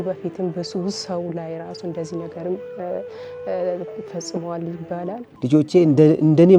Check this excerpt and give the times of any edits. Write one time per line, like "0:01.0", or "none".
0:05.2